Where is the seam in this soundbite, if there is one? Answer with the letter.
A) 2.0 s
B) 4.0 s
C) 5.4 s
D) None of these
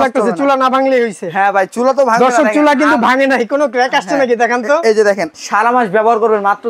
C